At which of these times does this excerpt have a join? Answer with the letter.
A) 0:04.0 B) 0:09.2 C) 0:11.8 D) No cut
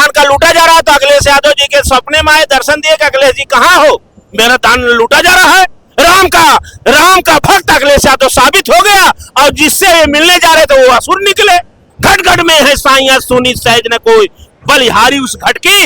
C